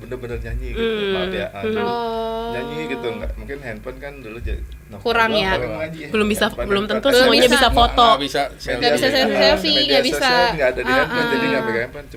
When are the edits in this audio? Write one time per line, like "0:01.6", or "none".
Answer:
none

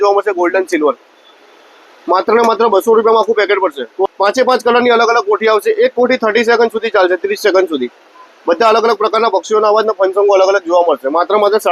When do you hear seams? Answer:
0:04.1

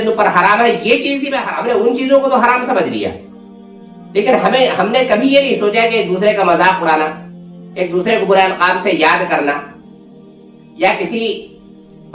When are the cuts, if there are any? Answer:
0:01.4

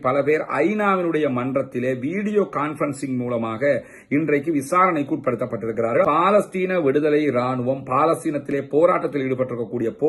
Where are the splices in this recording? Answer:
0:06.0

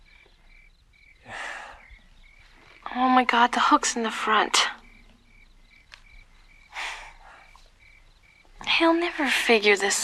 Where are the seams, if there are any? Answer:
none

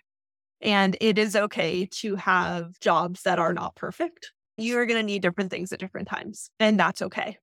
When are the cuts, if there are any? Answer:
0:02.7
0:04.6
0:06.5

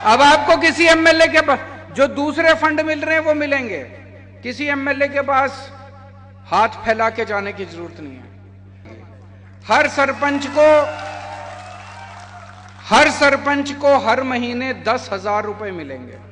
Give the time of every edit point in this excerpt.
0:08.9

